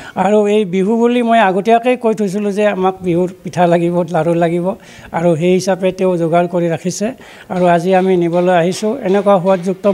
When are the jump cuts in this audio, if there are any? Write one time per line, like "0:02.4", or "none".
none